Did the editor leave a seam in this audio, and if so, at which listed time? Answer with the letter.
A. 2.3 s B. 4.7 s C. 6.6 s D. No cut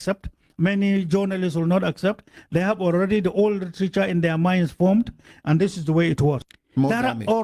C